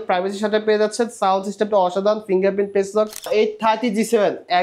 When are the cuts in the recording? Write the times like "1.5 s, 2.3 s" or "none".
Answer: 3.3 s